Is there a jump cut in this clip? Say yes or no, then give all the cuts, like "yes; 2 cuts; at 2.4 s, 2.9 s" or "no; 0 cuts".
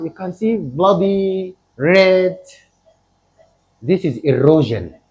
no; 0 cuts